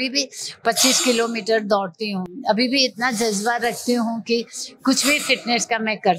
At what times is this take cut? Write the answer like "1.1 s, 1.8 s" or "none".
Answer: none